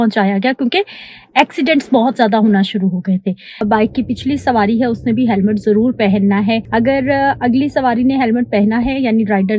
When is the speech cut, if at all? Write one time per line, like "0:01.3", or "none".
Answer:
0:03.6
0:06.6